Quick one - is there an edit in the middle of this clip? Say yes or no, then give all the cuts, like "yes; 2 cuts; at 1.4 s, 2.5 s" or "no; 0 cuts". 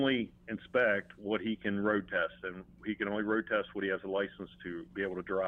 no; 0 cuts